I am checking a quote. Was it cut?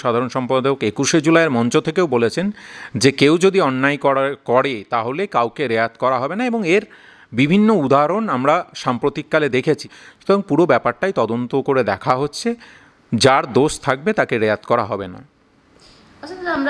no; 0 cuts

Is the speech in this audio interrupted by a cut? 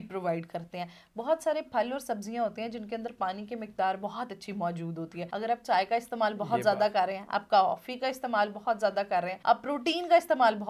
yes; 2 cuts; at 5.2 s, 9.3 s

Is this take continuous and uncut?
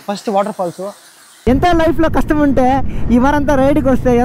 no; 1 cut; at 1.4 s

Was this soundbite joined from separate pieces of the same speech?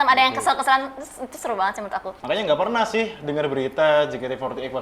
yes; 1 cut; at 2.1 s

